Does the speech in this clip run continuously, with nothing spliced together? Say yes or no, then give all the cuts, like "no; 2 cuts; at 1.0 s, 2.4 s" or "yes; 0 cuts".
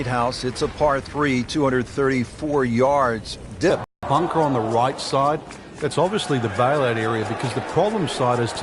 no; 1 cut; at 3.9 s